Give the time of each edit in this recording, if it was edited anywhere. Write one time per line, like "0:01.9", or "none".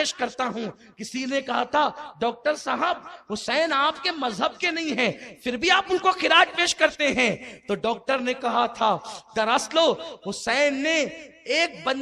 none